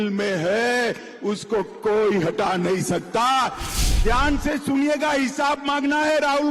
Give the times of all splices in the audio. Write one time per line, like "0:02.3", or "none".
0:03.7